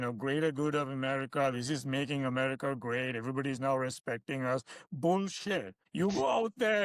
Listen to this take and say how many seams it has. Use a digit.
1